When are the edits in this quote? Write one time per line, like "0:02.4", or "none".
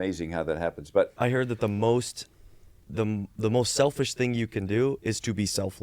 0:01.2